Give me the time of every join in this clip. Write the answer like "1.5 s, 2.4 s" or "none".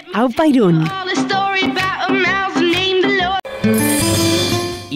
3.5 s

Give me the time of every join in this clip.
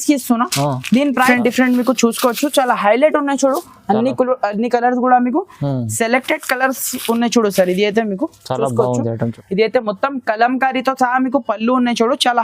1.3 s, 9.3 s

